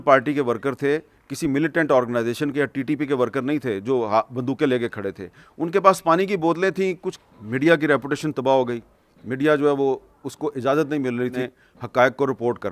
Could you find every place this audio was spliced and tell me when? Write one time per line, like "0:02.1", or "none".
0:07.1
0:11.4

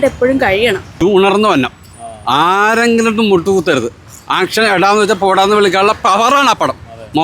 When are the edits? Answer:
0:01.0

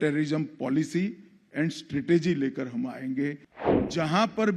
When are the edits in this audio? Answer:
0:03.5

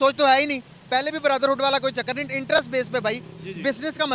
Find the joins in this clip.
none

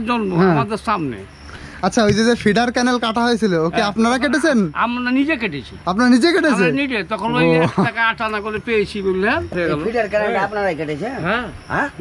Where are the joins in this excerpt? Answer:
0:09.5

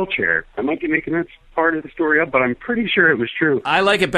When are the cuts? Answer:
none

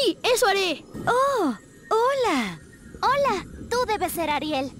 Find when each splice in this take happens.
0:01.0

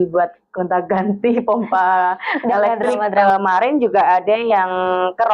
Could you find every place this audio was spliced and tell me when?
0:03.2

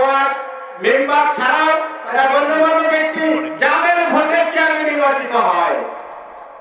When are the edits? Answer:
none

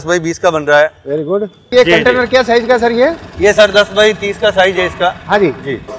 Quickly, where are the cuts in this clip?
0:01.7

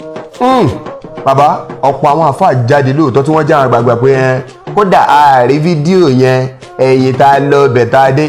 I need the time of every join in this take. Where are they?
none

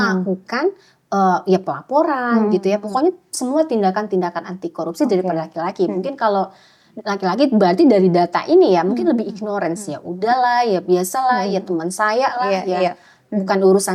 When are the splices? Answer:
none

